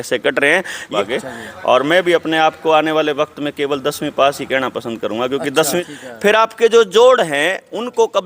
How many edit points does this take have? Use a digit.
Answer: 2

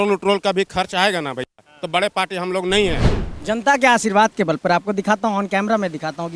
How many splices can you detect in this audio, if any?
1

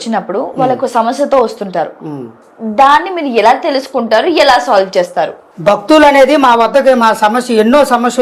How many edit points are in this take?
0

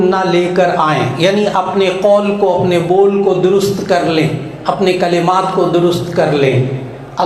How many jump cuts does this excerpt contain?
0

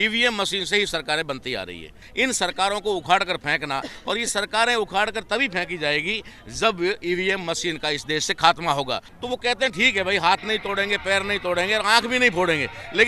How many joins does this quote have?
2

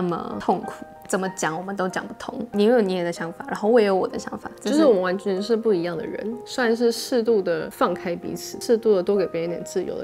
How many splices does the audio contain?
2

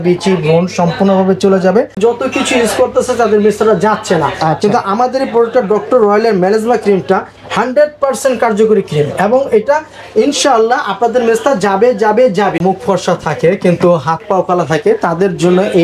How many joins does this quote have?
2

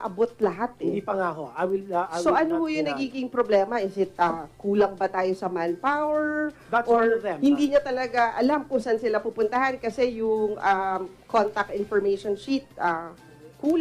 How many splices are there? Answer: 0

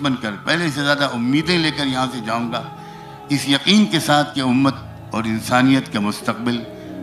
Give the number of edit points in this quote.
0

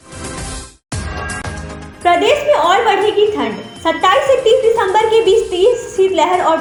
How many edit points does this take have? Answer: 0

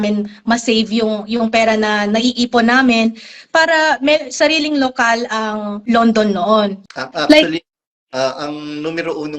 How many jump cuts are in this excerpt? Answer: 2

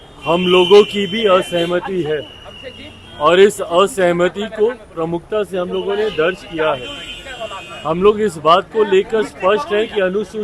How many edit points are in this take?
0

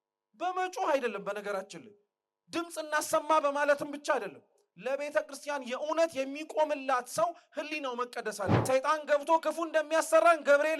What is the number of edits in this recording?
1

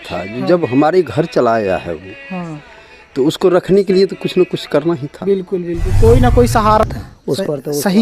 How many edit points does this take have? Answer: 1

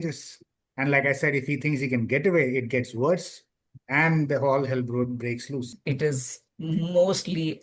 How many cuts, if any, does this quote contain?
1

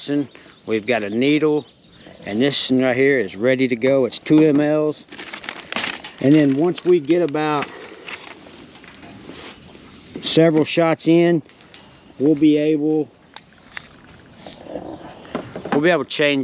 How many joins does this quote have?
0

